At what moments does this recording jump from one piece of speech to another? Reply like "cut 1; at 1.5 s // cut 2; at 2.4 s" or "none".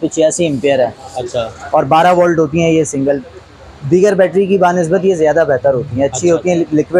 none